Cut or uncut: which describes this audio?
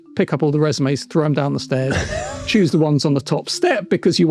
uncut